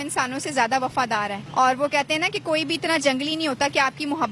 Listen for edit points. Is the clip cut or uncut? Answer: uncut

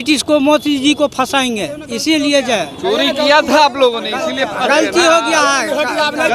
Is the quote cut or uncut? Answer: uncut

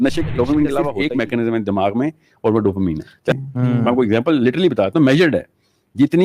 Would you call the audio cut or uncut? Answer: cut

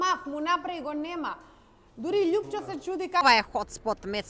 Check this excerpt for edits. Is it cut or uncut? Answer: cut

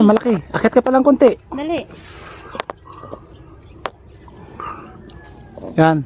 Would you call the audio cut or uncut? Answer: uncut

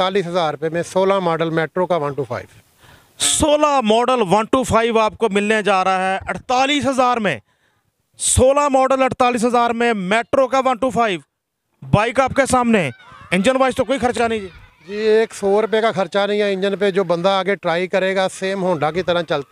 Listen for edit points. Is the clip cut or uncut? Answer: uncut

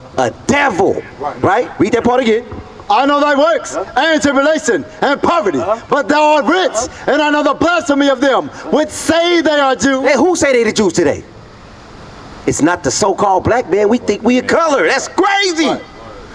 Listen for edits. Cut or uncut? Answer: cut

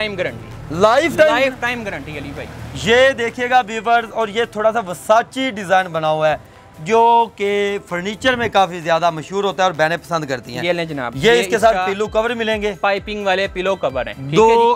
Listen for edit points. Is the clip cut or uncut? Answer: uncut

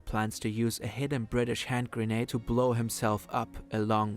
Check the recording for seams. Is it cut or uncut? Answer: cut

